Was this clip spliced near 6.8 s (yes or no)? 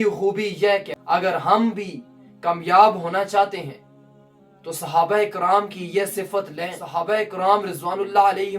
yes